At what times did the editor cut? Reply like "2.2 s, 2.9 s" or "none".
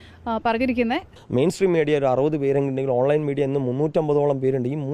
1.1 s